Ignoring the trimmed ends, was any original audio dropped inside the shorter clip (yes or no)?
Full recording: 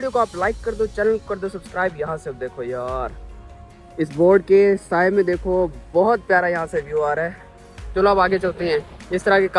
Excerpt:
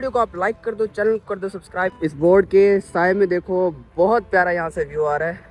yes